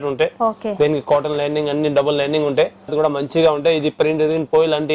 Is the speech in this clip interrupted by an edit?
yes; 1 cut; at 2.9 s

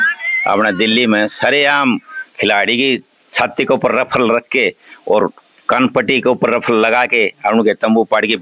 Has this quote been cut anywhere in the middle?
no; 0 cuts

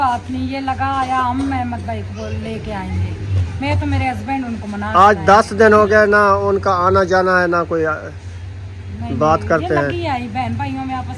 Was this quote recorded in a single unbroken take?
yes; 0 cuts

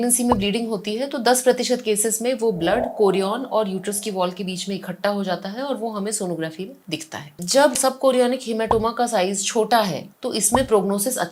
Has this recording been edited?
no; 0 cuts

